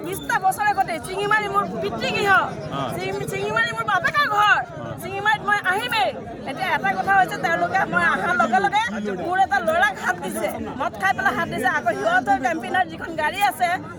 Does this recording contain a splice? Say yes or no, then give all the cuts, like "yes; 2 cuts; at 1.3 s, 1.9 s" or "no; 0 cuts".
no; 0 cuts